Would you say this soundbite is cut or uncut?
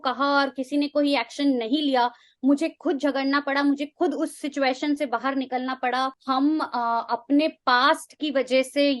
cut